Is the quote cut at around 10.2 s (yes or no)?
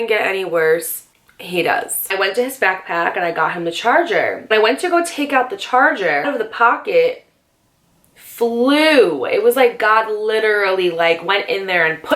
no